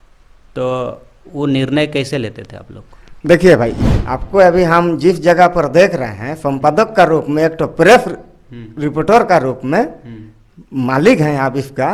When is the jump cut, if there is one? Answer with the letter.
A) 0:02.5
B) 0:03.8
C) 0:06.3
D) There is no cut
B